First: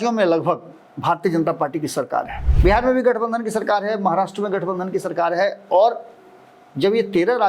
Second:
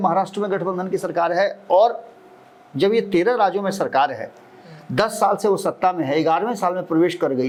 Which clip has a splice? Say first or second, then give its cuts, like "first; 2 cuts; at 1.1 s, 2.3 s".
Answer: first; 1 cut; at 2.4 s